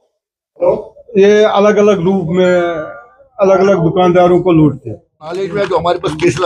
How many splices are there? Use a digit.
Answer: 1